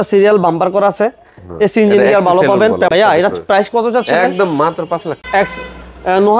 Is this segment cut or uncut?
cut